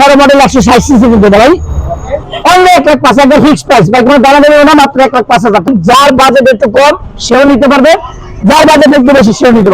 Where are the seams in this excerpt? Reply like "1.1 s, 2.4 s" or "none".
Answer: 2.2 s, 5.7 s